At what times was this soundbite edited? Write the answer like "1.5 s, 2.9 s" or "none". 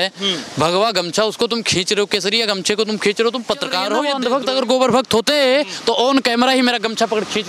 4.0 s